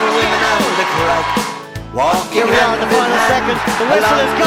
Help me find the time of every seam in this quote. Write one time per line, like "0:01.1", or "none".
none

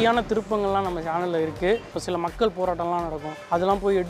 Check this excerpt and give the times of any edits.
0:01.9

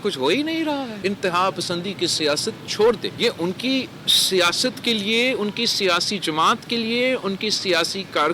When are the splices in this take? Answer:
0:00.9
0:03.1

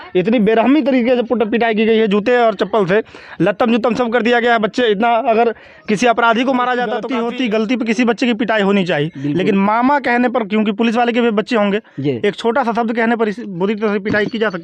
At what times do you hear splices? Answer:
0:07.1

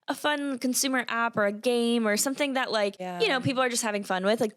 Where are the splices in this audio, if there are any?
0:03.0

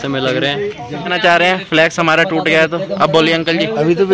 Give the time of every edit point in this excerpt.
0:01.0

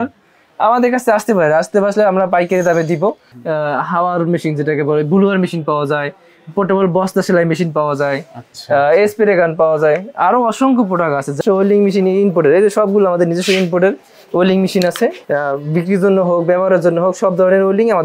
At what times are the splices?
0:03.3
0:11.4
0:15.2

